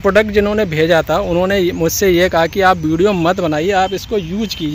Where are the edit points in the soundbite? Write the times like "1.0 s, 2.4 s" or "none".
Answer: none

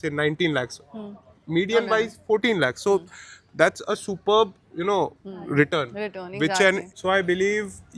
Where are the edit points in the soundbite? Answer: 6.9 s

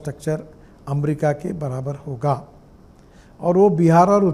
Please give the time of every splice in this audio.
none

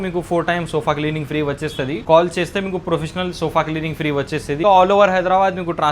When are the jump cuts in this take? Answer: 2.0 s, 4.6 s

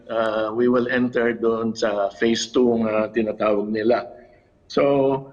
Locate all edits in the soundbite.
none

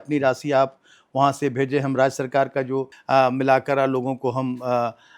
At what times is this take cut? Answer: 2.9 s

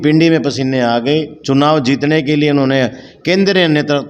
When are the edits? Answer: none

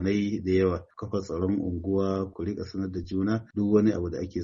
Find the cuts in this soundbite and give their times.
0.9 s, 2.3 s, 3.5 s

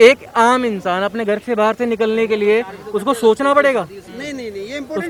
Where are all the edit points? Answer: none

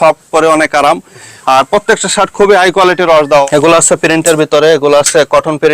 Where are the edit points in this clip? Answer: 3.5 s

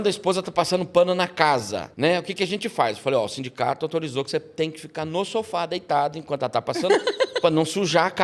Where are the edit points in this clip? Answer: 1.8 s

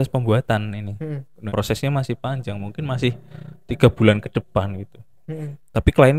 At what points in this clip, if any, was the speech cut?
1.3 s

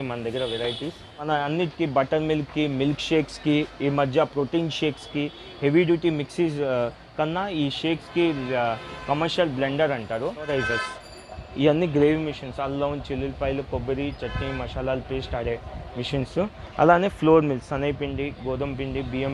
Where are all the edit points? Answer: 1.3 s, 10.5 s

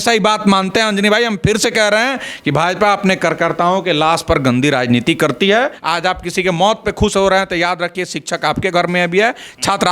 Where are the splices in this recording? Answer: 5.8 s

